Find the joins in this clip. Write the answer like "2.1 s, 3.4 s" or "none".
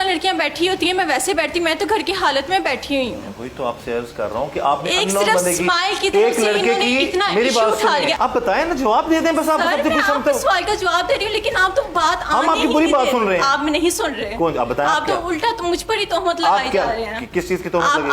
8.2 s